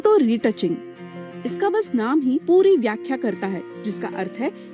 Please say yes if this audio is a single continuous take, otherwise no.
no